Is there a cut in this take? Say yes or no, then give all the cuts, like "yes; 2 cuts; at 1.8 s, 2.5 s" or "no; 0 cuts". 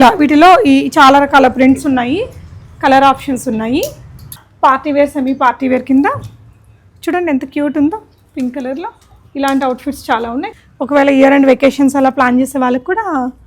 yes; 2 cuts; at 4.4 s, 10.5 s